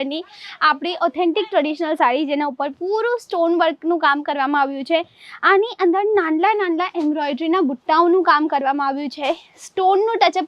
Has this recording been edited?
no; 0 cuts

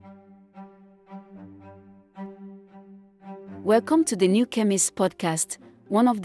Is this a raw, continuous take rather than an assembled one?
no; 1 cut; at 3.4 s

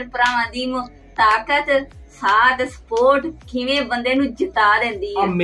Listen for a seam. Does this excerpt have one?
no; 0 cuts

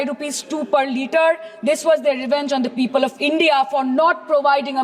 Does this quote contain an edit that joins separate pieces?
no; 0 cuts

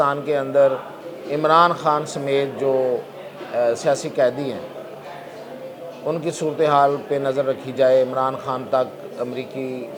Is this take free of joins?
yes; 0 cuts

